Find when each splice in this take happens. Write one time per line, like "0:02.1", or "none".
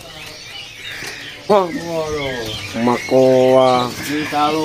0:01.5